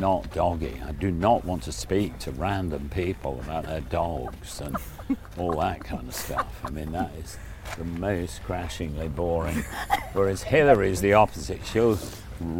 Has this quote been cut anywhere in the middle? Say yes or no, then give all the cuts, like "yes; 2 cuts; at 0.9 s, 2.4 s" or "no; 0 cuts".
no; 0 cuts